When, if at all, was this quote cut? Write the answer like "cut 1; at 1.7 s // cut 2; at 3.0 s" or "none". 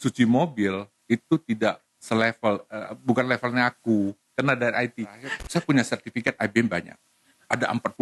cut 1; at 5.3 s